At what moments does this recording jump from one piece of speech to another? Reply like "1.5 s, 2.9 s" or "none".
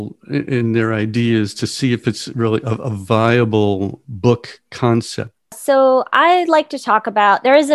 4.0 s, 5.6 s

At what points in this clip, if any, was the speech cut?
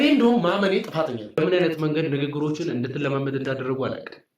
1.4 s

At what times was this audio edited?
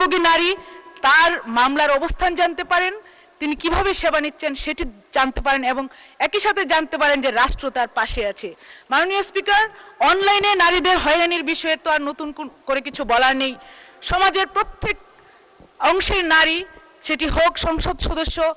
none

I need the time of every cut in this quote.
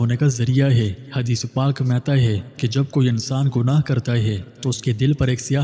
none

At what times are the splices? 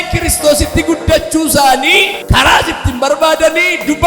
2.2 s

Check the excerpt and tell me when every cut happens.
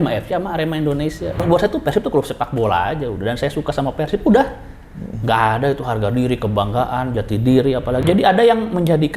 1.4 s, 8.0 s

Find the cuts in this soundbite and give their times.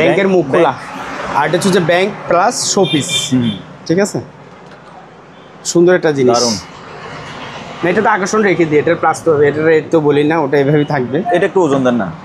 none

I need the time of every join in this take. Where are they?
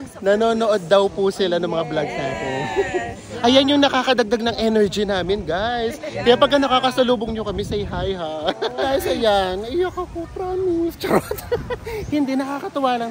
9.2 s

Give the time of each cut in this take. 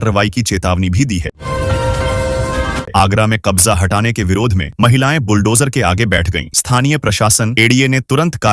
1.3 s, 2.9 s

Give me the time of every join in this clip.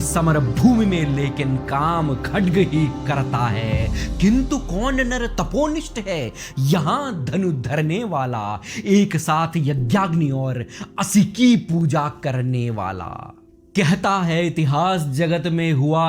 none

